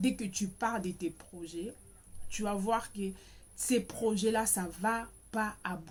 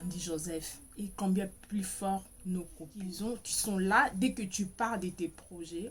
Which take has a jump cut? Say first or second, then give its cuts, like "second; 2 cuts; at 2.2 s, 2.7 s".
second; 1 cut; at 3.1 s